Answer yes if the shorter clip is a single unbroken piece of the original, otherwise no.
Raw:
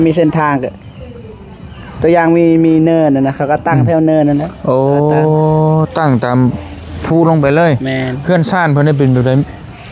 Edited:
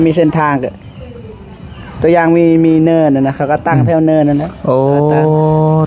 yes